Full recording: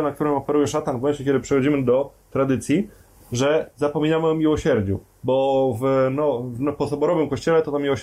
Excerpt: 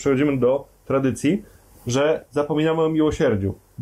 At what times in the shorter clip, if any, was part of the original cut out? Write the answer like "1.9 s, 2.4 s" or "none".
none